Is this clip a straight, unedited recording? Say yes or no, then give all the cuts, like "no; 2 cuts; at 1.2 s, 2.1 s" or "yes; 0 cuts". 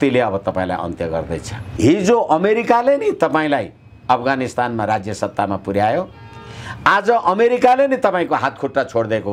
no; 1 cut; at 1.7 s